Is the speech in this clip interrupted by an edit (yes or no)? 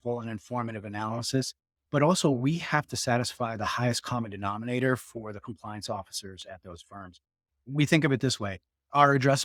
no